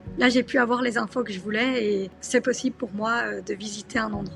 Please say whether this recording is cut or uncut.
cut